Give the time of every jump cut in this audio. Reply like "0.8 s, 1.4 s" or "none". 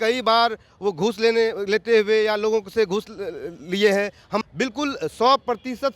4.4 s